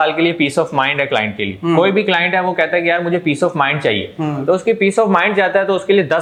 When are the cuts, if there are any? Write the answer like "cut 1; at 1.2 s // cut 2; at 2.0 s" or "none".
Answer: none